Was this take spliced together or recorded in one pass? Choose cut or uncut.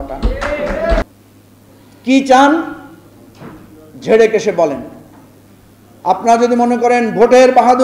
cut